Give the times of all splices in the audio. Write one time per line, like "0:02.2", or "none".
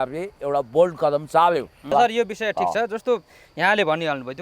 0:01.9